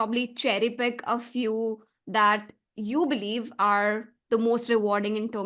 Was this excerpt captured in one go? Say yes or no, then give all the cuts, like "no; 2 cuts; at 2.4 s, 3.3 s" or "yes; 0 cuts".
yes; 0 cuts